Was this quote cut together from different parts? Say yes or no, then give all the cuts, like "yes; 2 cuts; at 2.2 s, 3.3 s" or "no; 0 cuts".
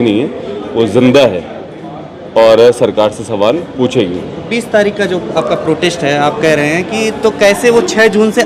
no; 0 cuts